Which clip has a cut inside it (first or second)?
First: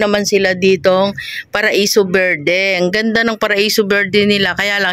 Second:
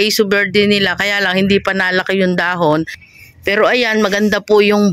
second